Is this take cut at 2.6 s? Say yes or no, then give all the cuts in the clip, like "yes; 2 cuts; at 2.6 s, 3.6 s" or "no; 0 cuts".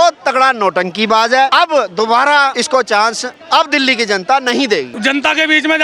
yes; 3 cuts; at 1.5 s, 2.6 s, 4.9 s